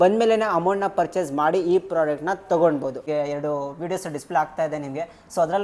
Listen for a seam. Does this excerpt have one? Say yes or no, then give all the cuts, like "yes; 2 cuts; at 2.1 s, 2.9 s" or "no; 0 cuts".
yes; 1 cut; at 3.0 s